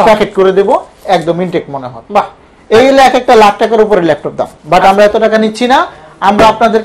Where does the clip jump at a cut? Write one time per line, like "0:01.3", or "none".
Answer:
none